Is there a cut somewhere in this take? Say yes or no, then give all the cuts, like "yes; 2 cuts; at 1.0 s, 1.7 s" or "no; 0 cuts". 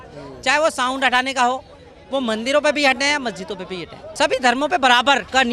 yes; 1 cut; at 4.0 s